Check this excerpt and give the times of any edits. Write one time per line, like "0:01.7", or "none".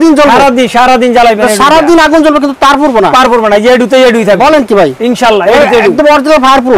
none